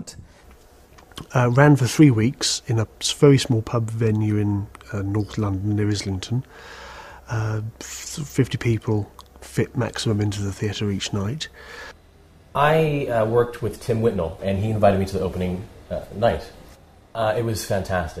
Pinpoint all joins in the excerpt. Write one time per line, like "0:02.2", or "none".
0:15.7